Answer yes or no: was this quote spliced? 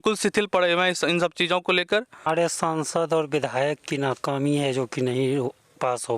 yes